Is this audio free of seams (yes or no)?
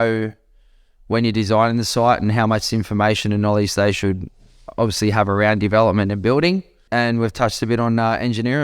no